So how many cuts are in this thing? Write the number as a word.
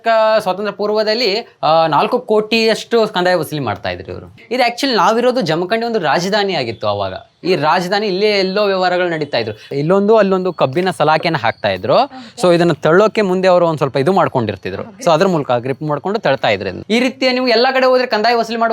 three